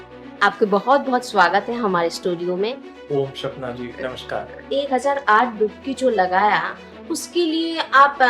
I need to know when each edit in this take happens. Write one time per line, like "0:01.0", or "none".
0:02.9
0:04.6